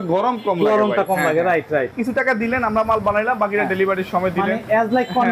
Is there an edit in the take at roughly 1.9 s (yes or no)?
yes